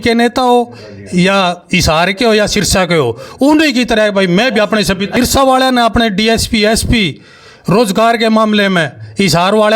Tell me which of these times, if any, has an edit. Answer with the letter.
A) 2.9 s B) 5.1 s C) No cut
B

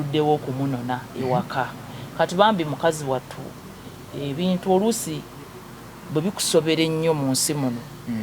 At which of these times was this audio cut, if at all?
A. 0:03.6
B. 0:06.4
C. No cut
C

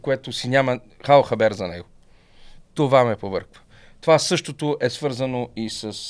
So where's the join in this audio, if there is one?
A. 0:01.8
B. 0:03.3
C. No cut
C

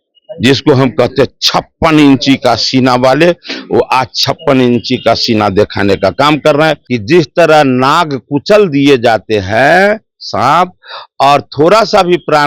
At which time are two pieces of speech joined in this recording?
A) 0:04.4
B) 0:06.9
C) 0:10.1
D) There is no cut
B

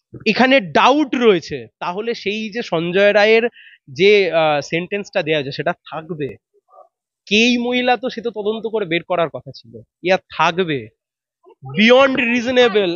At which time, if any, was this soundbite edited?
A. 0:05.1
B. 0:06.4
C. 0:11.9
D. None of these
D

